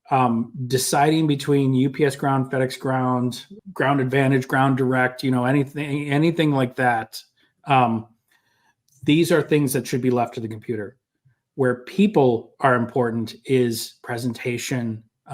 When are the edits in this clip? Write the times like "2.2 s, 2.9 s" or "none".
3.5 s